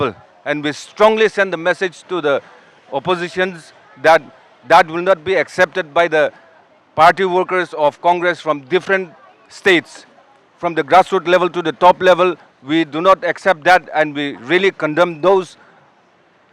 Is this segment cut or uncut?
uncut